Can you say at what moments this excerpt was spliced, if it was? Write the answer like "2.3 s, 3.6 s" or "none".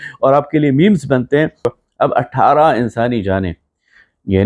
1.7 s